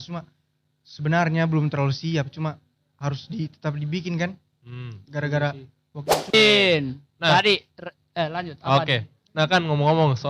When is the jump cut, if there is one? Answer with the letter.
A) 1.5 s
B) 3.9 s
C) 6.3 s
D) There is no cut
C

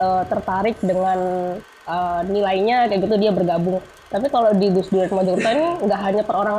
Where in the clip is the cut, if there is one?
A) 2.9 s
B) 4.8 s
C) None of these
C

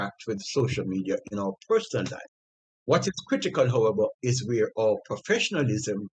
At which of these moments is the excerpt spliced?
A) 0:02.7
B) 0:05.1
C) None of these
A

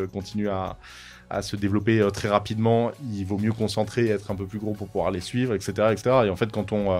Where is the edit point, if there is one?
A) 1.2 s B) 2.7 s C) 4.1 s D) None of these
A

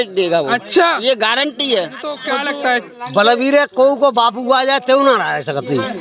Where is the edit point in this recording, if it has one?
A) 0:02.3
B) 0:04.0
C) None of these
A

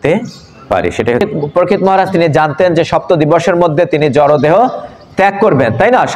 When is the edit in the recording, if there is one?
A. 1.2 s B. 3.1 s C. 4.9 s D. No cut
A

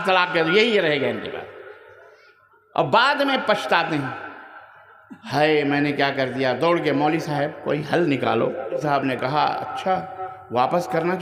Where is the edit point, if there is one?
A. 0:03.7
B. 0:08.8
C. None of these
B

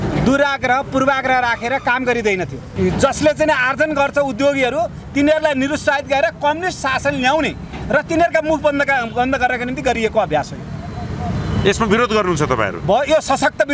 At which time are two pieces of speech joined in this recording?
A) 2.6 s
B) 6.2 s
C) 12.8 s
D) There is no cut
A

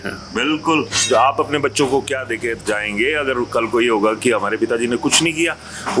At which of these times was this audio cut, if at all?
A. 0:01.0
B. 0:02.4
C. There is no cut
A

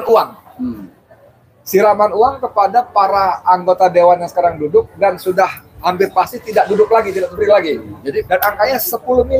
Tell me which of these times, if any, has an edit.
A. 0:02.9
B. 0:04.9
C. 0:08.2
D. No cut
C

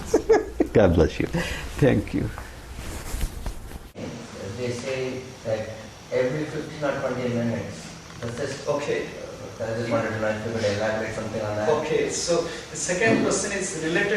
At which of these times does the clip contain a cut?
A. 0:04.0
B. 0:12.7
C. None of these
A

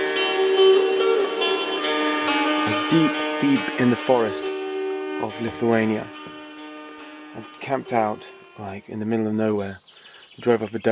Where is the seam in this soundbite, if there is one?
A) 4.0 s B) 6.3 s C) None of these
C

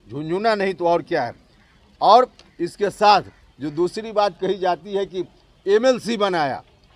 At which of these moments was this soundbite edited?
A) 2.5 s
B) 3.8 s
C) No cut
C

